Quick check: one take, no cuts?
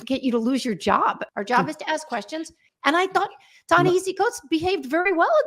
no; 2 cuts; at 1.2 s, 2.7 s

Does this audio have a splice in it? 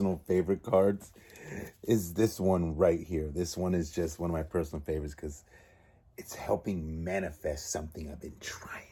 no; 0 cuts

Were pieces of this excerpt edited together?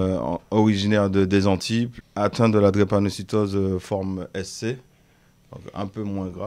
yes; 1 cut; at 2.0 s

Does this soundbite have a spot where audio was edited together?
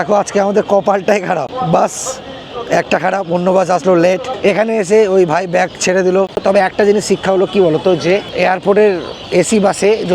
yes; 3 cuts; at 1.5 s, 4.3 s, 6.3 s

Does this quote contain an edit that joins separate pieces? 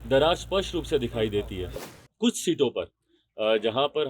yes; 1 cut; at 1.9 s

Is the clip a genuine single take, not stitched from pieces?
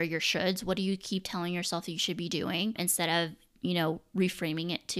no; 1 cut; at 2.8 s

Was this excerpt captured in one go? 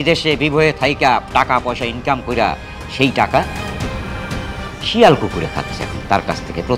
yes; 0 cuts

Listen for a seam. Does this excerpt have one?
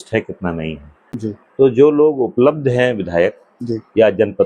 yes; 1 cut; at 1.3 s

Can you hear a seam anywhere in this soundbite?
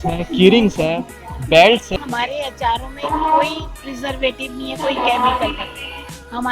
yes; 1 cut; at 1.9 s

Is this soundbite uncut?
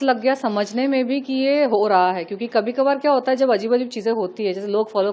yes; 0 cuts

